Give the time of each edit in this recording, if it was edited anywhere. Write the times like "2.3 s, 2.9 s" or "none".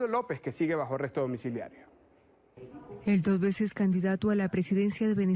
none